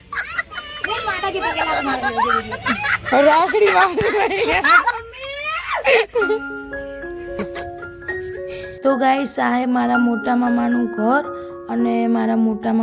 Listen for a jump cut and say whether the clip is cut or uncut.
uncut